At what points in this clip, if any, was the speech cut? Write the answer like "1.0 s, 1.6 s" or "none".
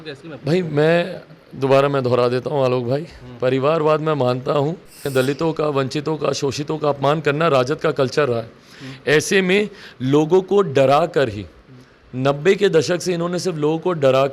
5.0 s